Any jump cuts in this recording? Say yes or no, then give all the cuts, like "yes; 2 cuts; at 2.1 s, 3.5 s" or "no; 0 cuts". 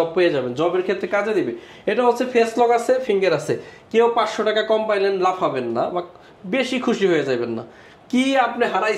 no; 0 cuts